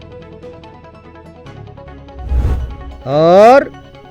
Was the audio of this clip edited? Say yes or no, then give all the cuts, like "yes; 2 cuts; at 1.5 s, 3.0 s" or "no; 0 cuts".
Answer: no; 0 cuts